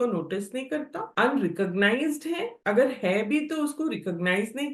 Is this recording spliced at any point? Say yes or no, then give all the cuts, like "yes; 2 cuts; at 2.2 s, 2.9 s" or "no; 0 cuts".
yes; 2 cuts; at 1.0 s, 2.5 s